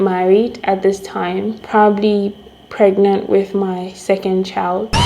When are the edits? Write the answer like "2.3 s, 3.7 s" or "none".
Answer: none